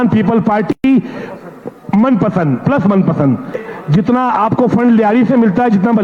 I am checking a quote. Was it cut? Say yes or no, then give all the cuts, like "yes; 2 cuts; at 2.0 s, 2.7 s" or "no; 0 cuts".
yes; 1 cut; at 3.6 s